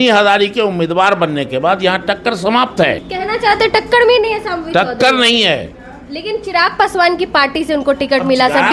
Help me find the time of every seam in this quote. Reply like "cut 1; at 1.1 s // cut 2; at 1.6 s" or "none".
cut 1; at 3.1 s